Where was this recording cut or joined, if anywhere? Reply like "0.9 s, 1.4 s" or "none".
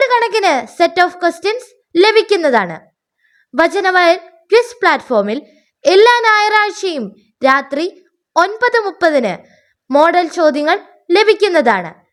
none